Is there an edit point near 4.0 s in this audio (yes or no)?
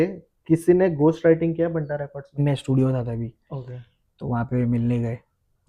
no